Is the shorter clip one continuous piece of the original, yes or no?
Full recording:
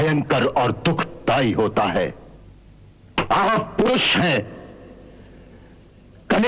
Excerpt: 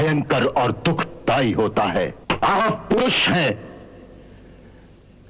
no